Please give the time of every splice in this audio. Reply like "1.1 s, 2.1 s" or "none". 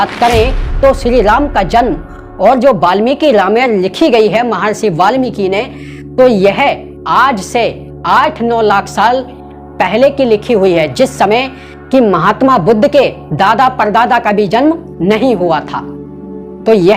none